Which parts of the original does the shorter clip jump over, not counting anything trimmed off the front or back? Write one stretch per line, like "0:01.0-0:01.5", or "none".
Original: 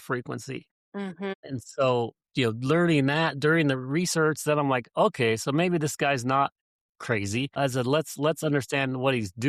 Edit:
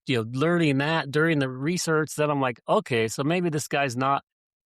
none